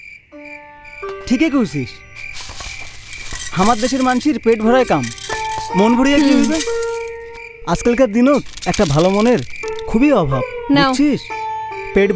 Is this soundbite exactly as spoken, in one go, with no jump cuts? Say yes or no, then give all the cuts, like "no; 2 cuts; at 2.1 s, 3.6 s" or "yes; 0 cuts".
yes; 0 cuts